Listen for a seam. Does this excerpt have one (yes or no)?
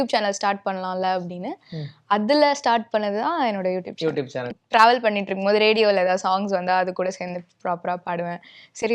yes